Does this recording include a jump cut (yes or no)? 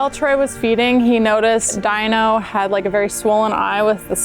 yes